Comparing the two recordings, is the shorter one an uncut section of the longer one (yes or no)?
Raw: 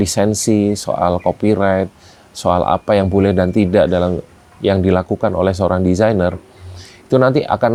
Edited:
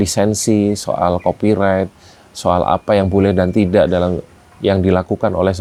yes